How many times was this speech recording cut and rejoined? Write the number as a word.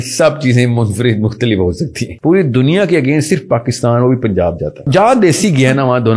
two